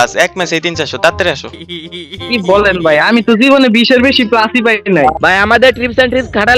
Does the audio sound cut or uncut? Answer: cut